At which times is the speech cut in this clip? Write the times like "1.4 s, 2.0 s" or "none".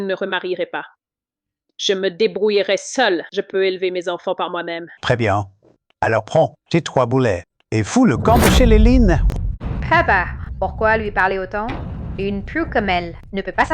9.6 s

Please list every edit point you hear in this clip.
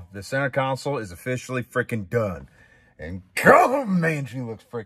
none

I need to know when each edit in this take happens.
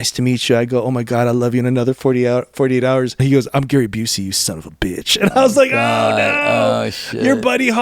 3.2 s

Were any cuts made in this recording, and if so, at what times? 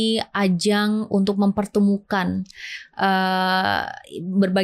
none

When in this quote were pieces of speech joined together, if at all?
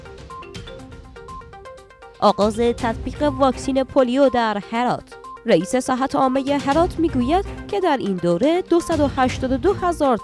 none

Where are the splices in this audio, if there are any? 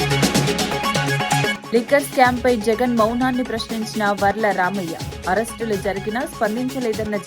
1.5 s

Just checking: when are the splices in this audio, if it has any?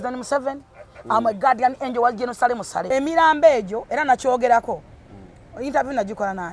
2.9 s

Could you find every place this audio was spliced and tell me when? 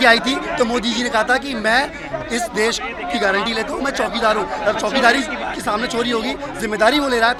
none

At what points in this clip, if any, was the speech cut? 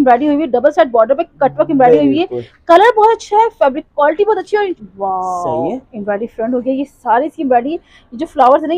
4.7 s

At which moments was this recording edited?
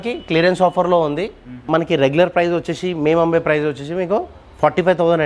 1.4 s

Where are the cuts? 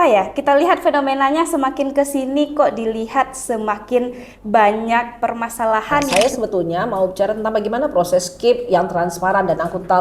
6.1 s

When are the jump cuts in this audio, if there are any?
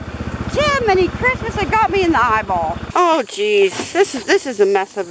2.8 s

